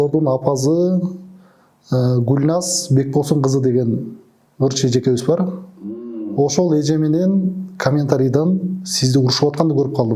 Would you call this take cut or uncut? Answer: uncut